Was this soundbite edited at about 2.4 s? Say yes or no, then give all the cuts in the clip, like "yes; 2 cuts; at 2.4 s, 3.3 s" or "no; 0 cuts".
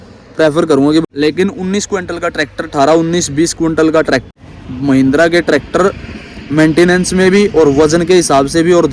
no; 2 cuts; at 1.0 s, 4.3 s